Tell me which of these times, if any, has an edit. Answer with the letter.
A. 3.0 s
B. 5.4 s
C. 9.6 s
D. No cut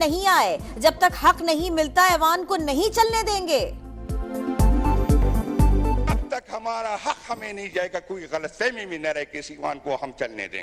D